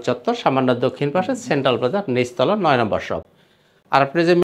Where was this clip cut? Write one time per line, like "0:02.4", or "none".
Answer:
none